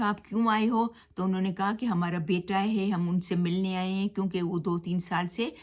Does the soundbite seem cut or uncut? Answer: uncut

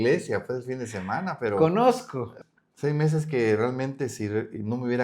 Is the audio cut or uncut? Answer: cut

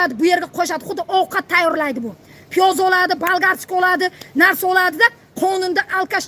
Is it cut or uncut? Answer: uncut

